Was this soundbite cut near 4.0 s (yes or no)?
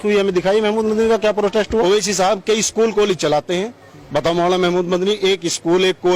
no